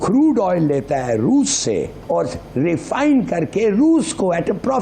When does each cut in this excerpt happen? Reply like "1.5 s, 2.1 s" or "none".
2.0 s